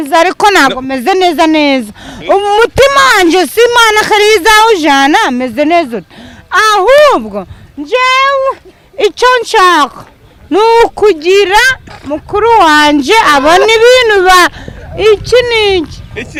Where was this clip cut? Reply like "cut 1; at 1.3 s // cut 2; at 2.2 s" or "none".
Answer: none